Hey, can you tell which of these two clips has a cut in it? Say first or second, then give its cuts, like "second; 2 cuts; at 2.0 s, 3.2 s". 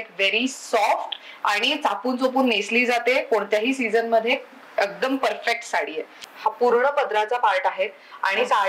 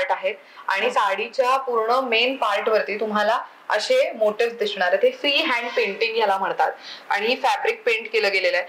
first; 1 cut; at 6.2 s